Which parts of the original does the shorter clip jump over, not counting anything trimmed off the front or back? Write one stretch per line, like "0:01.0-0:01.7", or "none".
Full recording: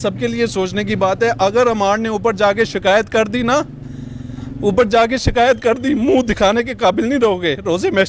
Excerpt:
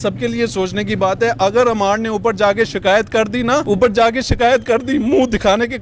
0:03.6-0:04.6